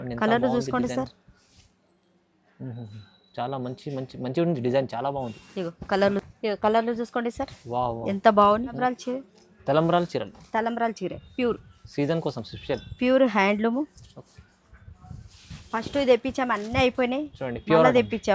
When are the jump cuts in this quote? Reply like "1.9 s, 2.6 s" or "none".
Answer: 8.8 s